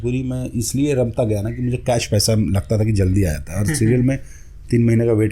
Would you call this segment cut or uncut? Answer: uncut